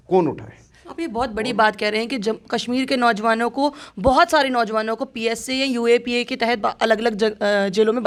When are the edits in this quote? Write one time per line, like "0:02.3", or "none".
none